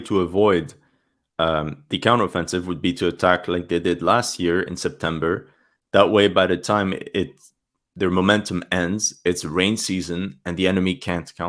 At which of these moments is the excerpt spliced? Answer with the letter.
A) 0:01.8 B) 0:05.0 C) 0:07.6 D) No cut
D